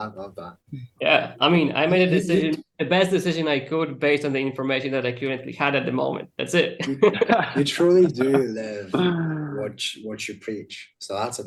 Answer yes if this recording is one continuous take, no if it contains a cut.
yes